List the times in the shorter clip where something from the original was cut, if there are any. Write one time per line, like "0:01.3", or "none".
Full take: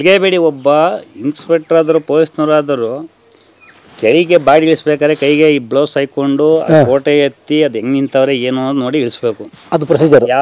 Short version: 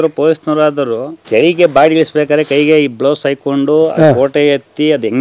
0:01.1